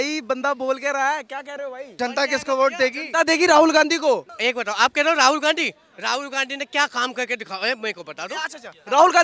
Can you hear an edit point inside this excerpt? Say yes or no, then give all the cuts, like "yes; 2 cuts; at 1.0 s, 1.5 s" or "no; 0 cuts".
yes; 2 cuts; at 1.9 s, 4.3 s